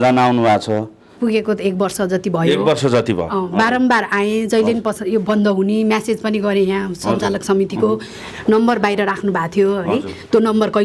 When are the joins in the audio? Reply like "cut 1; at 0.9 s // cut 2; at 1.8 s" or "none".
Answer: cut 1; at 1.1 s